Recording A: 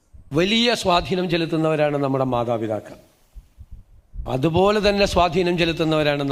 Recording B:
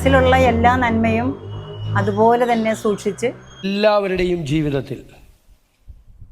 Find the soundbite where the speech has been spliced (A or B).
B